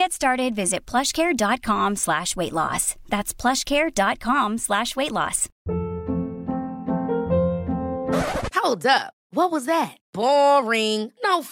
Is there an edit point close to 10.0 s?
no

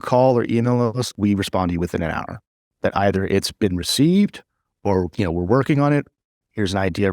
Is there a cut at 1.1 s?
yes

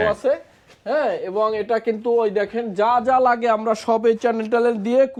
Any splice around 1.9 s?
no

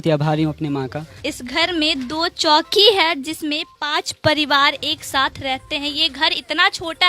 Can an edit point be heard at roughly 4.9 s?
no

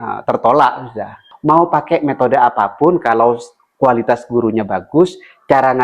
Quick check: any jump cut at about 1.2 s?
yes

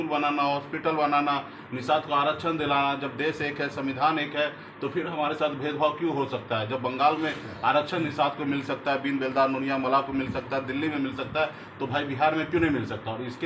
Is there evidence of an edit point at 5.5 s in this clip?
no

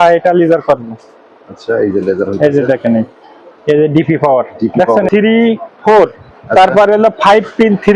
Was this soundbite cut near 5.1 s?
yes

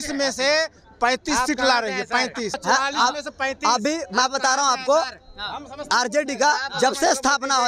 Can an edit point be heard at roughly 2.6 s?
yes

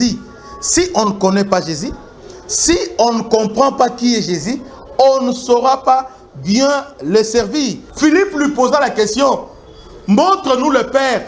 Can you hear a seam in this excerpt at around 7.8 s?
yes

